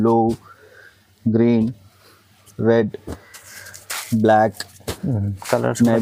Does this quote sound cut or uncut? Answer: uncut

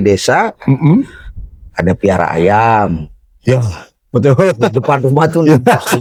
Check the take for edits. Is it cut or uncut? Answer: uncut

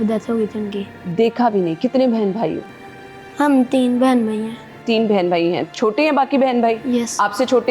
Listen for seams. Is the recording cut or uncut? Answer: uncut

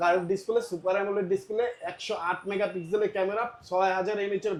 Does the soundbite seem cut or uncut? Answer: uncut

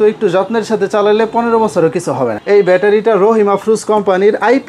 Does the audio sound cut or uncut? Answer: cut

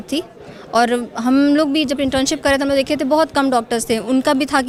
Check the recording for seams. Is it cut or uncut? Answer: uncut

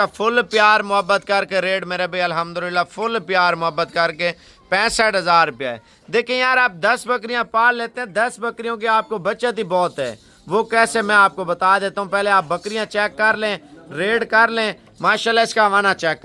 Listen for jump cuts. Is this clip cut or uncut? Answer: uncut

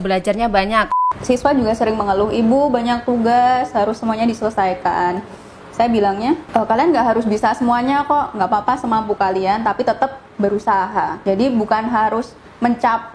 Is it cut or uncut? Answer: cut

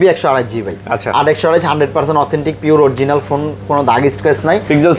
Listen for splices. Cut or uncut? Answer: uncut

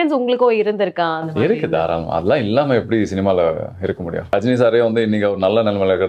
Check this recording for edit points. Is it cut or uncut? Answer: cut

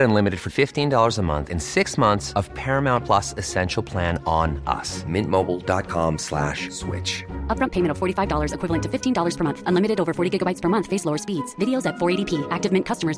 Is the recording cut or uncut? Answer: uncut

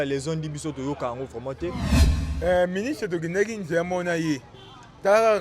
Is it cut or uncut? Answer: cut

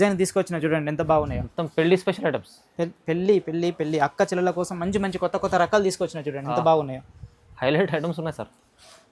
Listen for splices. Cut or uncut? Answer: uncut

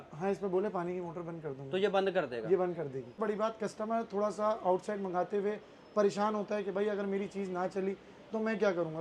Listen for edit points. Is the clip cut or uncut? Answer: cut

